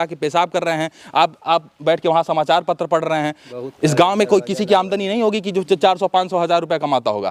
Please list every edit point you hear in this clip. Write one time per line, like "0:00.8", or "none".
0:03.5